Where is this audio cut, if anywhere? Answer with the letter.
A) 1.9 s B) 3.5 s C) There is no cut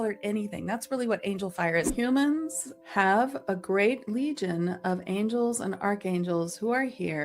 A